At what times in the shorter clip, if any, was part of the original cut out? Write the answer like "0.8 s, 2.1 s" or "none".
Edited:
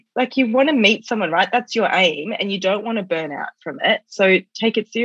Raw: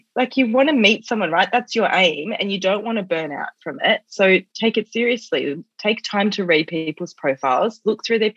none